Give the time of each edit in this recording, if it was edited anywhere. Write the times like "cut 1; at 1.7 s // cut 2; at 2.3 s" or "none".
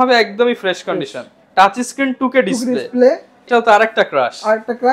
cut 1; at 3.3 s